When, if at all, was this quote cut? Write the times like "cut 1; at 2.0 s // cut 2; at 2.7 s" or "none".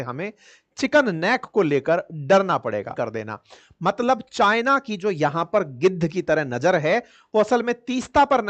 cut 1; at 2.9 s